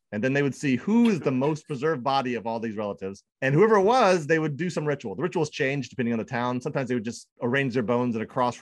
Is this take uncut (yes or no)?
no